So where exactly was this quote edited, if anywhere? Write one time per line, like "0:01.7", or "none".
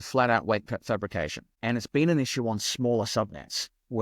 0:01.4